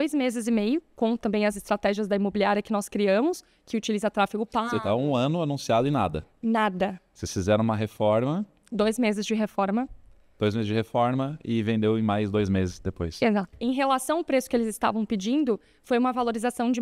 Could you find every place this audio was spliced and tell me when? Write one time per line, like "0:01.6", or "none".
0:13.5

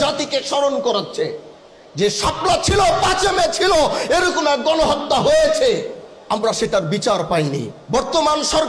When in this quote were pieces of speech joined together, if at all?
0:07.7

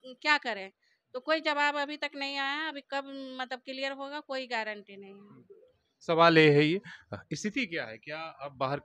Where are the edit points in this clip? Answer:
none

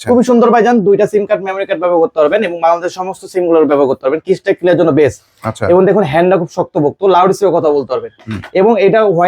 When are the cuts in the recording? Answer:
none

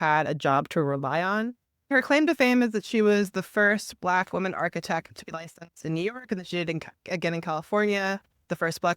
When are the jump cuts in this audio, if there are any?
0:01.9

